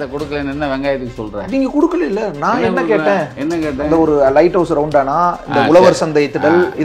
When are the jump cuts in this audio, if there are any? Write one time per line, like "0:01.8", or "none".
none